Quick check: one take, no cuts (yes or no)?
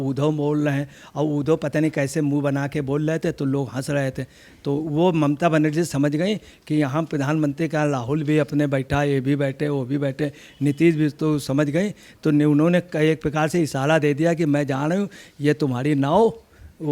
yes